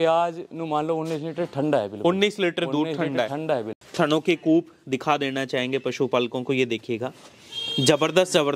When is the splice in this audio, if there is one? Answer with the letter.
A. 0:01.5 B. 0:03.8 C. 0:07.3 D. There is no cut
B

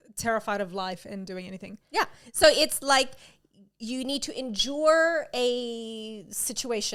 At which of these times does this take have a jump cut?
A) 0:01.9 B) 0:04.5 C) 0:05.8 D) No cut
D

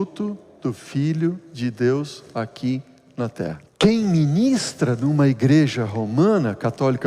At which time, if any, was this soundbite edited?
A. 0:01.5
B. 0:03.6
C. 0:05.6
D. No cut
B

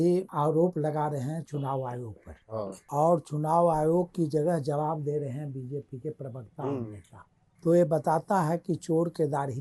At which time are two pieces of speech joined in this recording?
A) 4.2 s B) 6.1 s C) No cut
C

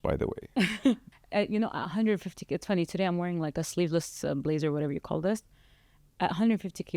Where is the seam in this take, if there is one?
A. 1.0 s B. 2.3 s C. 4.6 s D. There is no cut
A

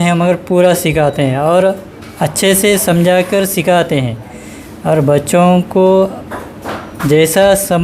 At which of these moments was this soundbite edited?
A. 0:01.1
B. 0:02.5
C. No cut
C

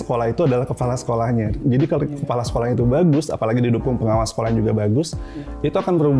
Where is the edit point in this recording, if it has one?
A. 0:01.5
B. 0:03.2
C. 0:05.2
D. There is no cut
A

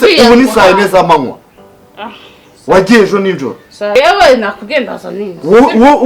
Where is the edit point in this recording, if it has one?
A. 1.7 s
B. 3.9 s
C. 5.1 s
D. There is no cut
B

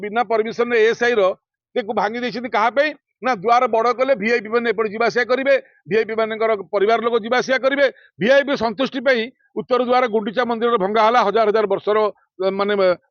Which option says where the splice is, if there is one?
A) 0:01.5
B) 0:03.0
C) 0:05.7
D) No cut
D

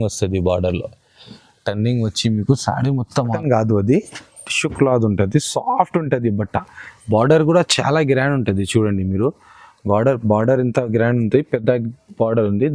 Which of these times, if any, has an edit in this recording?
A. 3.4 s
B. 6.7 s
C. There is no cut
A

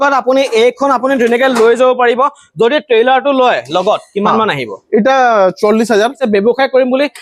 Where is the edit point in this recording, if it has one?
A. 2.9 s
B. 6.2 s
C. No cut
B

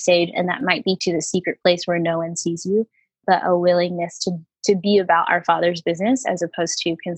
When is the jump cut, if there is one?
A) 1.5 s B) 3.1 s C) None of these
C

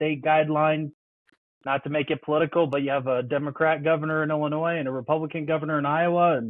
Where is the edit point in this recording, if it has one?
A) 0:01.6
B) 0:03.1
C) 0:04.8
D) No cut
D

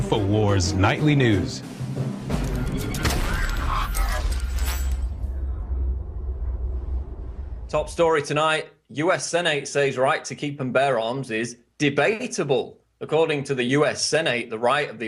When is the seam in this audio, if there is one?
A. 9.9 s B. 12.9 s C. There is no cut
C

